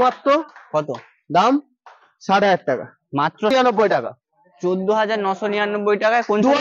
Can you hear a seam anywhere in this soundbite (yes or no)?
yes